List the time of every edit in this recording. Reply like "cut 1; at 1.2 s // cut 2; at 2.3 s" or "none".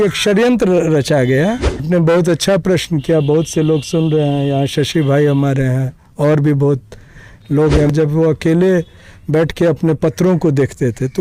cut 1; at 1.8 s // cut 2; at 7.8 s